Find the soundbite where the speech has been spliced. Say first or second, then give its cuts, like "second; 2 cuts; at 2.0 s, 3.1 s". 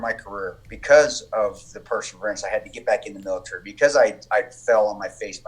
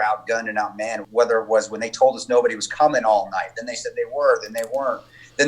second; 1 cut; at 1.0 s